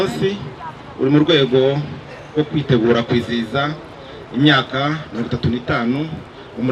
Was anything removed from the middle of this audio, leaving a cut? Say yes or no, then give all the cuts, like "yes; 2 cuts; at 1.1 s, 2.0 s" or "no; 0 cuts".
no; 0 cuts